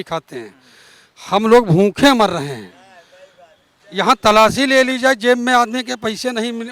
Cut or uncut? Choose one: uncut